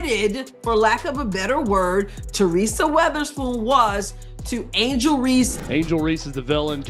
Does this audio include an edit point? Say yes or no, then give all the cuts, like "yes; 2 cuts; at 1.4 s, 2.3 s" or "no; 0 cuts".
yes; 1 cut; at 5.5 s